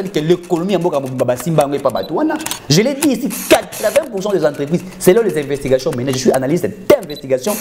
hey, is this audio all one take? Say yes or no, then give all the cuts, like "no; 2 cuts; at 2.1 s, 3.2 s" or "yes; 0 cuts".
yes; 0 cuts